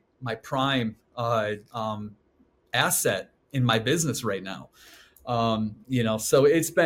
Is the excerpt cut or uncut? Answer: uncut